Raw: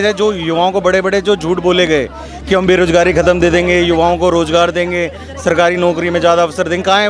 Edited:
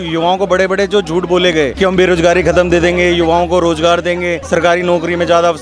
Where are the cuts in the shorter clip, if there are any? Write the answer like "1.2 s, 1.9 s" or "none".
1.7 s, 4.4 s